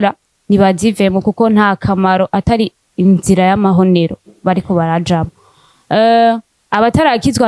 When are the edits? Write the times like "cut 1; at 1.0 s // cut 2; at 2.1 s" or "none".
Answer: none